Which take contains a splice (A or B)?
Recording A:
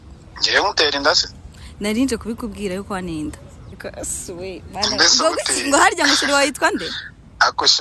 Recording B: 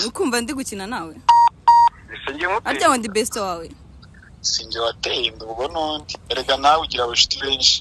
A